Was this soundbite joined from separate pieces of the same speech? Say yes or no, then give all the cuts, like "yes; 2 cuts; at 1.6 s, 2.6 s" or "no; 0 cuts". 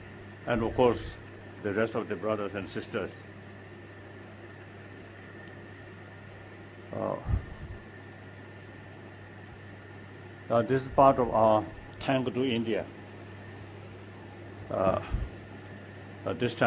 no; 0 cuts